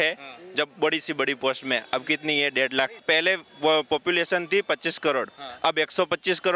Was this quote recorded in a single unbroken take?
no; 1 cut; at 3.0 s

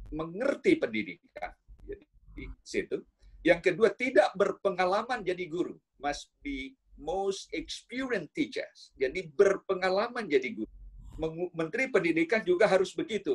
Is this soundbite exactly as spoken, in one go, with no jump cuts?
no; 1 cut; at 10.6 s

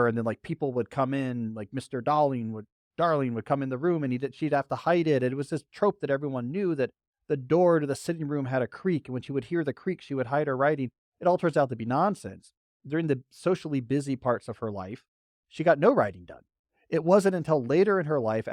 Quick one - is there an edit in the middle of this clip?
no; 0 cuts

